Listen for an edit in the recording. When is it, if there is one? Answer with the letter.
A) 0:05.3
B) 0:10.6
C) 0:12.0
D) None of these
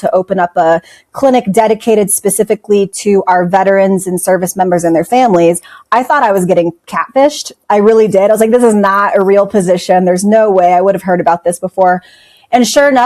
D